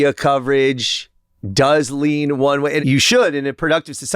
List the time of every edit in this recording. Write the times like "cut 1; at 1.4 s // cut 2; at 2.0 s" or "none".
cut 1; at 2.8 s